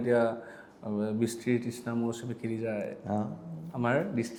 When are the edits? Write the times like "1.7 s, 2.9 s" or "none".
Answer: none